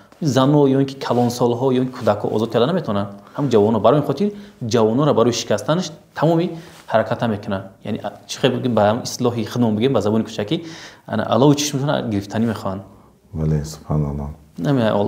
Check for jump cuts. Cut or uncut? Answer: uncut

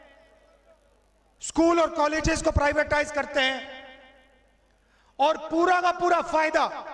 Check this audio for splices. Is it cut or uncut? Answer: uncut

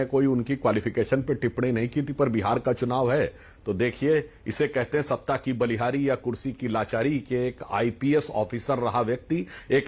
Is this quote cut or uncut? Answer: uncut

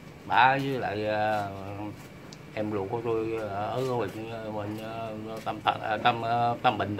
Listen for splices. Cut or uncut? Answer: uncut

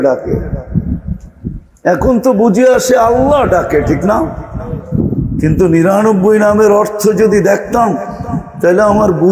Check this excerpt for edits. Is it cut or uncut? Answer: uncut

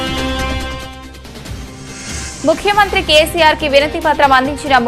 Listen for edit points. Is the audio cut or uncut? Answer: cut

